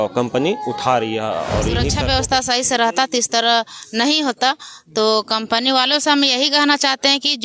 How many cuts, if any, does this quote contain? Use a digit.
1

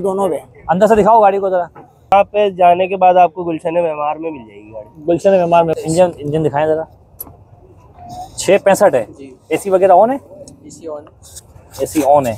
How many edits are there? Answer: 2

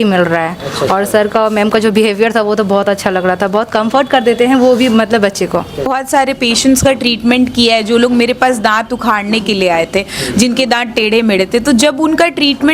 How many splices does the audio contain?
1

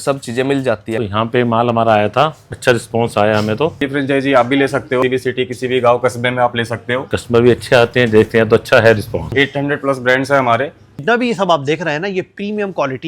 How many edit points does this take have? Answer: 7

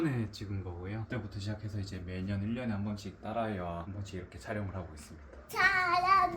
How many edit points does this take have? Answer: 3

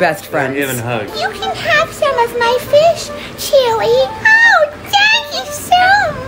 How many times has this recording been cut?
1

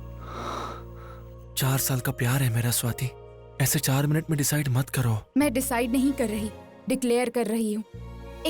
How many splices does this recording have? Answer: 0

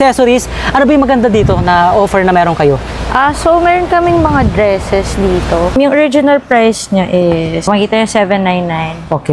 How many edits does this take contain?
2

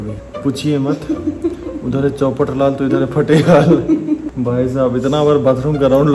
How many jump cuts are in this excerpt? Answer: 0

